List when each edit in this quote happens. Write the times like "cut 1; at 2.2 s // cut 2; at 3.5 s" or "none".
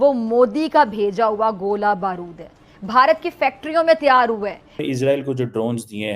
cut 1; at 1.7 s // cut 2; at 4.8 s